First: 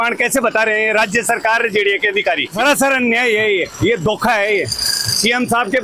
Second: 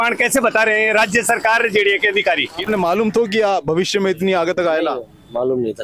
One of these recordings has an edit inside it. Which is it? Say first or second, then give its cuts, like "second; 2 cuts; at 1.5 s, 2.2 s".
second; 1 cut; at 2.5 s